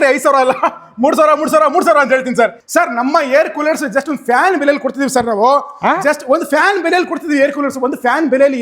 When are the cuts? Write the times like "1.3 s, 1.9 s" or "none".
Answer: 2.6 s